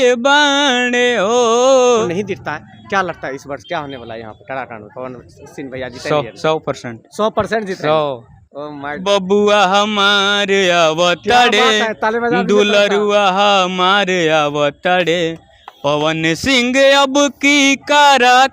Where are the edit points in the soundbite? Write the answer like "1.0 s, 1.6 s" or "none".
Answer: 2.0 s, 9.0 s